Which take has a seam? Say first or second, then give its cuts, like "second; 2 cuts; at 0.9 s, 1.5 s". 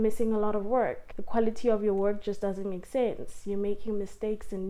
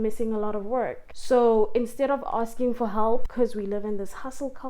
second; 1 cut; at 1.1 s